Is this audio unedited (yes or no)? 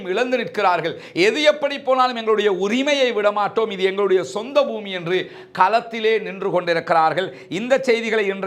yes